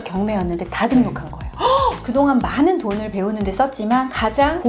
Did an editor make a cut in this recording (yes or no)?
yes